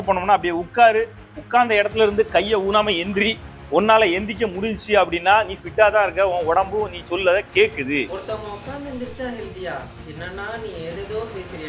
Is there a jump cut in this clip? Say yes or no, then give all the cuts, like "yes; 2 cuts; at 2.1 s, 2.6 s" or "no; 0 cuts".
no; 0 cuts